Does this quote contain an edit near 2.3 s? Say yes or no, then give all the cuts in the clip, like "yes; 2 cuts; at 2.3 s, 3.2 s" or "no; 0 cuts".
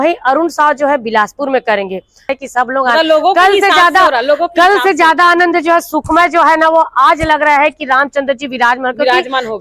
yes; 1 cut; at 2.3 s